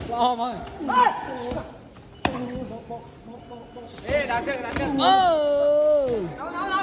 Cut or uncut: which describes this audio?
uncut